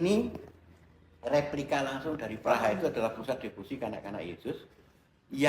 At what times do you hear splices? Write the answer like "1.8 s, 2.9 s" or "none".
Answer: 2.4 s